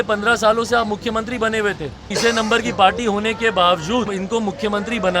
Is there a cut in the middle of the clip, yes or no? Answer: yes